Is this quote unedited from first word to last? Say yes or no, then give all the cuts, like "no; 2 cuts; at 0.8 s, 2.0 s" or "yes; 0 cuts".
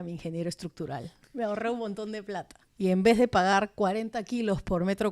no; 1 cut; at 2.6 s